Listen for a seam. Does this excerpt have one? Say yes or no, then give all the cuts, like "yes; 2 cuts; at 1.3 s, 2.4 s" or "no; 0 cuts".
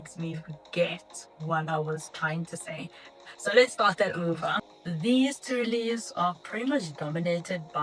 yes; 1 cut; at 4.7 s